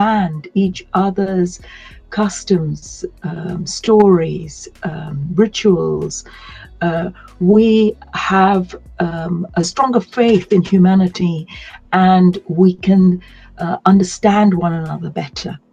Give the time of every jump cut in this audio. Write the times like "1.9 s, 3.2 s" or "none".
none